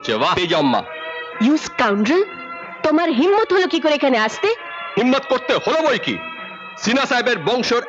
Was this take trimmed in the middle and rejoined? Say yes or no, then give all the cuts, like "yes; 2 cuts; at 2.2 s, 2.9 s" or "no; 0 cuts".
no; 0 cuts